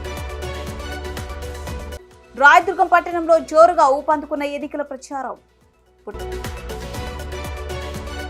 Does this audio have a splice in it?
no; 0 cuts

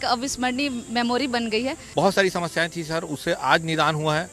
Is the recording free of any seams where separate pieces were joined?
no; 1 cut; at 1.8 s

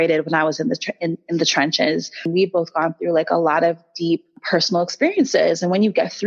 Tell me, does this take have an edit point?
yes; 2 cuts; at 2.3 s, 4.4 s

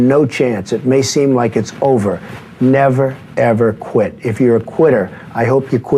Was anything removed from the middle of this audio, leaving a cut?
no; 0 cuts

